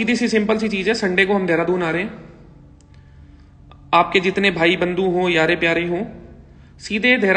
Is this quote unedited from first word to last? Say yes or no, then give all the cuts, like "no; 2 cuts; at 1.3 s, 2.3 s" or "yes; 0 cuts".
yes; 0 cuts